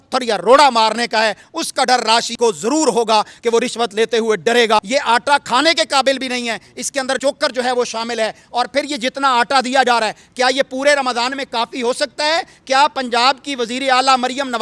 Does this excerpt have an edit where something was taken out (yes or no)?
yes